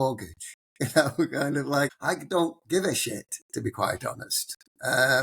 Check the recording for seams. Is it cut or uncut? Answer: cut